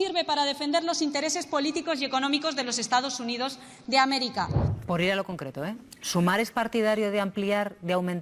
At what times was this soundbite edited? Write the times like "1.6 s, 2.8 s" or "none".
4.7 s